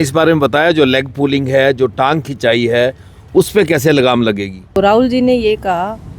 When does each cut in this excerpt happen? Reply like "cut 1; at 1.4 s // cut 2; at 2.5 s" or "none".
cut 1; at 4.6 s